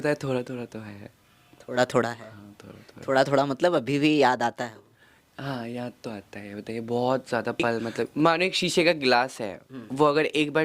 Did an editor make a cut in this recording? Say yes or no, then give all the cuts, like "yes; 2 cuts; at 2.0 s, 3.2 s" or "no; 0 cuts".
yes; 1 cut; at 8.1 s